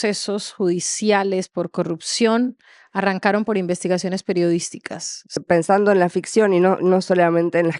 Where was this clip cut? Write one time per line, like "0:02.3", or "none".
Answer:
0:05.4